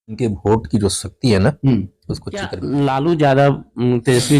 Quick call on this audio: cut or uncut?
cut